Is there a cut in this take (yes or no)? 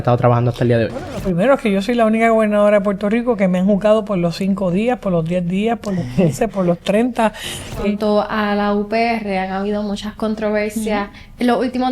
yes